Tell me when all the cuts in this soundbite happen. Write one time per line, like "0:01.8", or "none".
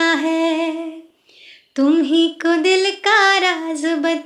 none